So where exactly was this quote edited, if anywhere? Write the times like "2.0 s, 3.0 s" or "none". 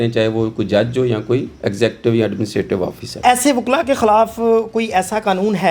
3.2 s